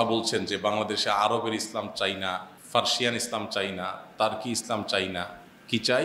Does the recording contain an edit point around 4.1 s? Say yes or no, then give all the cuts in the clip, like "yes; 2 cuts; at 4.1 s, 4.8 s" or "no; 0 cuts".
no; 1 cut; at 2.5 s